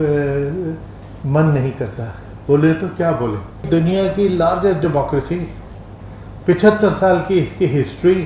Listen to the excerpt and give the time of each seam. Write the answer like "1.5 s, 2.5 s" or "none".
3.6 s